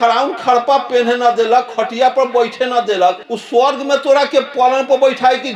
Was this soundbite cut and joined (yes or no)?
no